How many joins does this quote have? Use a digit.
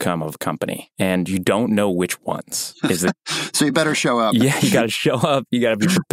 0